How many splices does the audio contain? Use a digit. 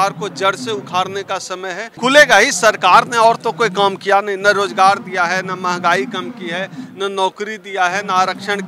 1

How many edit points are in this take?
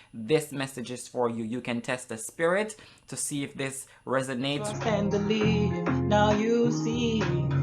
1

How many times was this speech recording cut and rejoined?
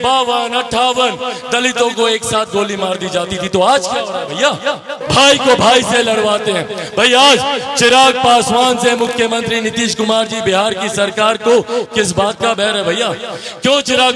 1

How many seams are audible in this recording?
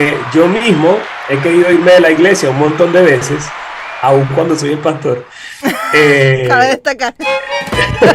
1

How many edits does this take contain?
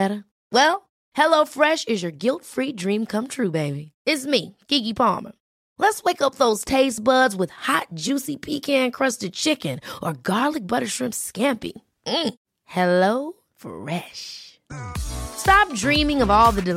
0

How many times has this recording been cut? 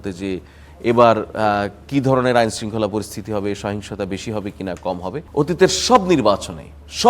1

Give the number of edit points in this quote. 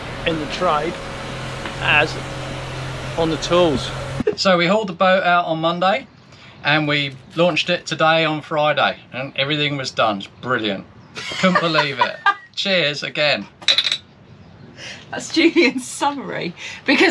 1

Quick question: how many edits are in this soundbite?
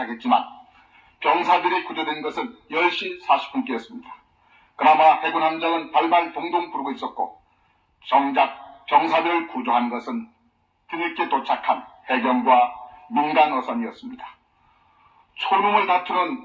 1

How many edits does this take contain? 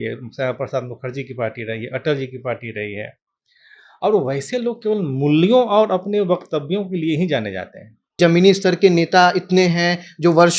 1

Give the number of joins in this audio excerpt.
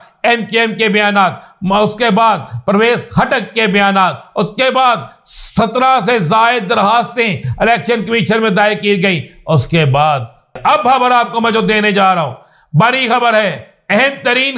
1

